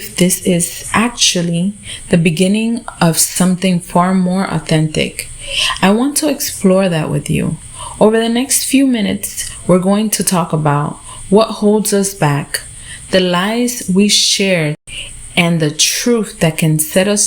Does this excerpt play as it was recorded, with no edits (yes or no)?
no